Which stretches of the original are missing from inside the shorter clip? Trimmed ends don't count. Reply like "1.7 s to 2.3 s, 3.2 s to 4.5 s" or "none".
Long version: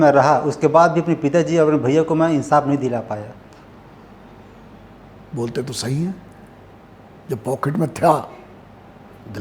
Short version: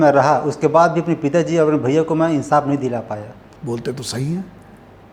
3.4 s to 5.1 s